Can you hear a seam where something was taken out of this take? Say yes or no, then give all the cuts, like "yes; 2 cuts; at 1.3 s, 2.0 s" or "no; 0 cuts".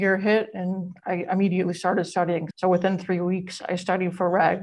yes; 1 cut; at 2.5 s